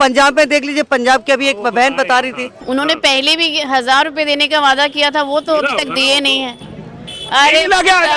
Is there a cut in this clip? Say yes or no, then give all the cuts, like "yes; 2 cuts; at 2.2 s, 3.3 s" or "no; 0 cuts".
yes; 1 cut; at 2.6 s